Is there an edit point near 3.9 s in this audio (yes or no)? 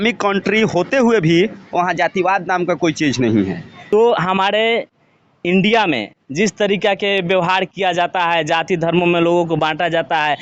yes